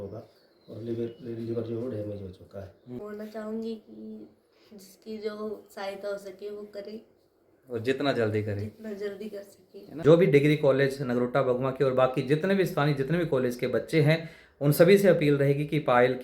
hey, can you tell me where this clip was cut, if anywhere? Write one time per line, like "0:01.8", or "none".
0:03.0
0:10.0

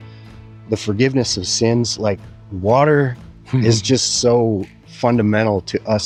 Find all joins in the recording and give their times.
none

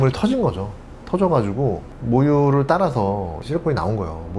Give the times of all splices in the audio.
0:03.4

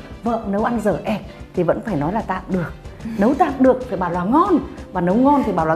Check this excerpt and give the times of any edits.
none

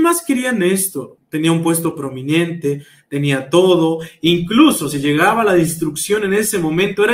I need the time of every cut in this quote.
0:01.1

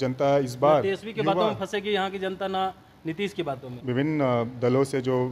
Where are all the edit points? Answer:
0:03.8

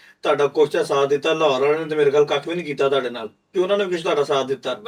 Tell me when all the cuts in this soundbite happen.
none

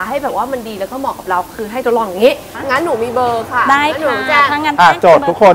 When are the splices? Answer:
0:02.5

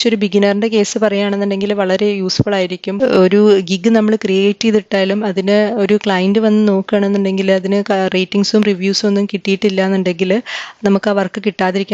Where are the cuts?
0:02.9

